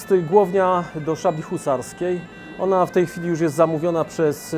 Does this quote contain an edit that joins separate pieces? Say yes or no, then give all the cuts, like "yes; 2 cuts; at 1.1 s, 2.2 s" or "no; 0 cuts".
no; 0 cuts